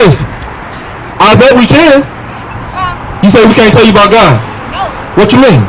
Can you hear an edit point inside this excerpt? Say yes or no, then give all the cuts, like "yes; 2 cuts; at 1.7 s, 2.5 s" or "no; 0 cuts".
no; 0 cuts